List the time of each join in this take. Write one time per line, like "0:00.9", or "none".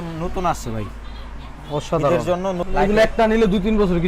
0:02.6

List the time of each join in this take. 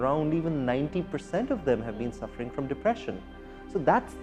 none

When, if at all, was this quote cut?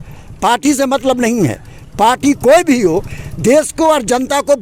none

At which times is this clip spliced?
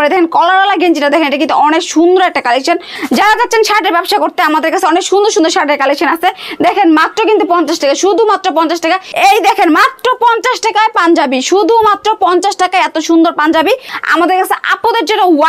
0:02.9
0:09.1
0:13.9

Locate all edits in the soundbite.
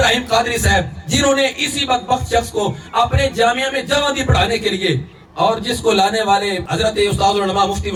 none

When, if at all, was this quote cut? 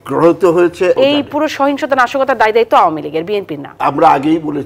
0:01.0

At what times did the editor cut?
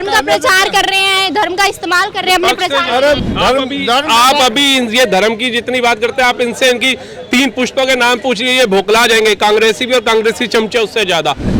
0:03.2

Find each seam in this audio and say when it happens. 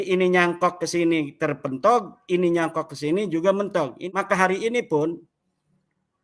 0:04.0

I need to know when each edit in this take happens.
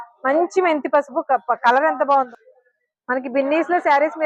0:02.3

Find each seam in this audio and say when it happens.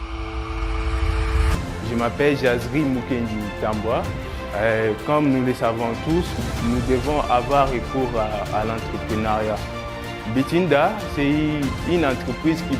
0:01.5

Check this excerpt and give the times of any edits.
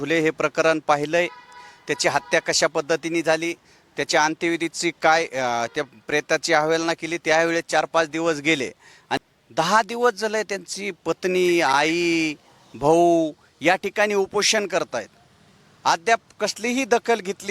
0:09.2

